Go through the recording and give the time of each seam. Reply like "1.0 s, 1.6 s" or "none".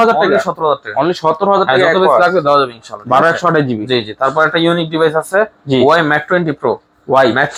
none